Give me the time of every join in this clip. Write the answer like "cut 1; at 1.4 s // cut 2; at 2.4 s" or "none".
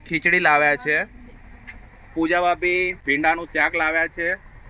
cut 1; at 2.9 s